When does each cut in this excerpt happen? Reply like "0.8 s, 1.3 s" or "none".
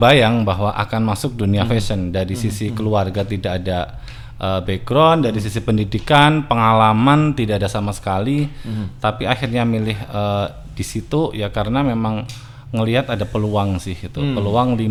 none

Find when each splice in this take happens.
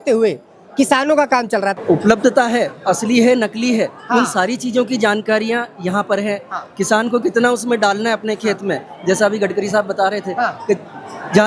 1.8 s

